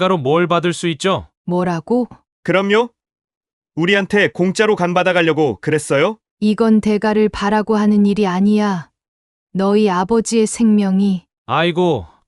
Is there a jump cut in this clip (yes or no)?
yes